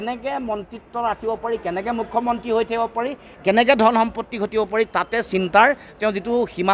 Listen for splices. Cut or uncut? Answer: uncut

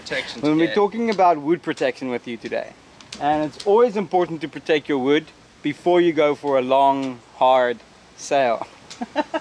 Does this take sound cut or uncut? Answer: uncut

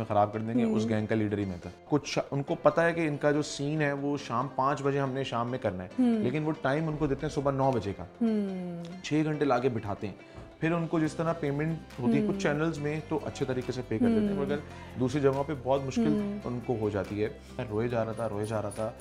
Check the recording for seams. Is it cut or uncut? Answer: cut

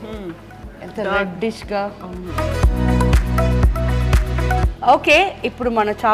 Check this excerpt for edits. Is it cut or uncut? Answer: uncut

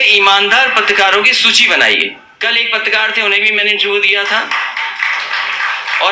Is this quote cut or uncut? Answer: cut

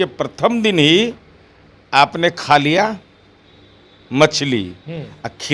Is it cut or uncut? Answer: uncut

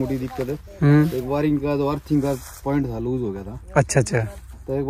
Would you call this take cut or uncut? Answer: uncut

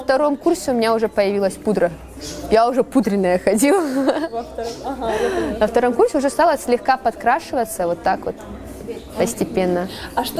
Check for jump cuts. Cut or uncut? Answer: uncut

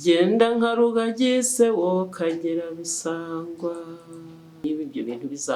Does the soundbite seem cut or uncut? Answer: cut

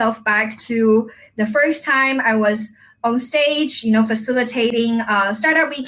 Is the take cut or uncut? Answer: uncut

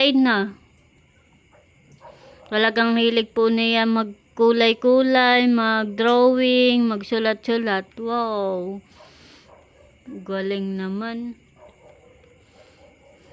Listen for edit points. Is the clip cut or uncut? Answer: uncut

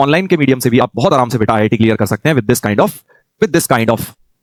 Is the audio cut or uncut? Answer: uncut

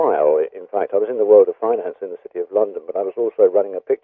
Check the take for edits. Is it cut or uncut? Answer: cut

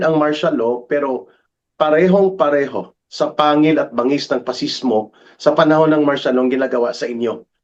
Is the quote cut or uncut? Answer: uncut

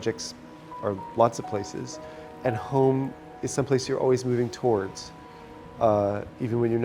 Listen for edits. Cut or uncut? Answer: cut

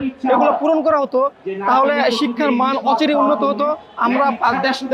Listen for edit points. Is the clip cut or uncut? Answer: uncut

